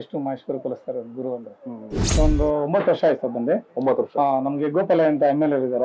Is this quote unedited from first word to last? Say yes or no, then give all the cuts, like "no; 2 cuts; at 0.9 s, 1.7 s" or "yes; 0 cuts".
no; 1 cut; at 2.1 s